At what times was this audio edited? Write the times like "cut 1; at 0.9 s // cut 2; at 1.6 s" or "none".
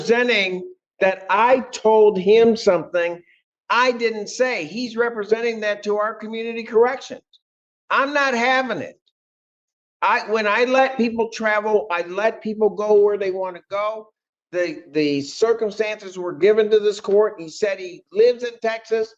cut 1; at 5.8 s